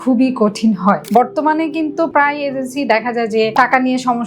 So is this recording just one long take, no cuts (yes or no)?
no